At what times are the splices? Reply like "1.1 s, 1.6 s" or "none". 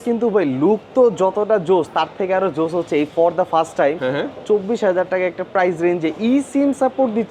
none